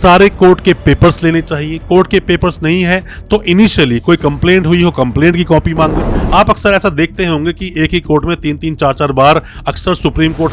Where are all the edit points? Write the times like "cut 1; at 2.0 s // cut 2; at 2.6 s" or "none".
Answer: cut 1; at 6.0 s

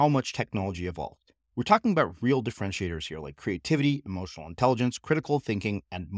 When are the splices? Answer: none

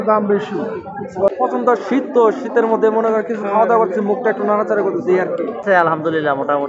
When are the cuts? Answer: cut 1; at 1.3 s // cut 2; at 5.6 s

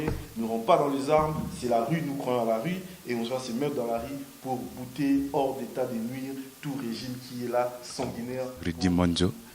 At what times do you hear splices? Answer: cut 1; at 8.7 s

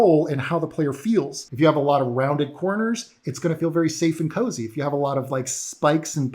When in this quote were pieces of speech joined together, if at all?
cut 1; at 1.4 s

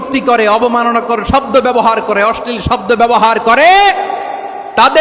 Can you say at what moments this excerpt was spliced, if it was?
none

